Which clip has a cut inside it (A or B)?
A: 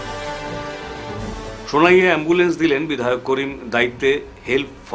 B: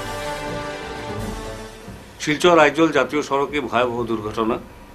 A